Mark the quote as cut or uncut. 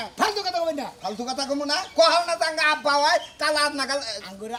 uncut